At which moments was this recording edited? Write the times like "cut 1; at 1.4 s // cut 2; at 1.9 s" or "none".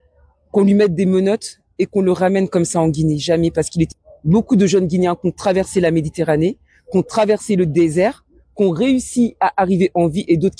cut 1; at 4.0 s